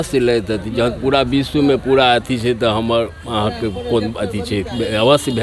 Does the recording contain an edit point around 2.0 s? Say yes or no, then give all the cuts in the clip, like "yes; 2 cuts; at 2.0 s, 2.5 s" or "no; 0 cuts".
no; 0 cuts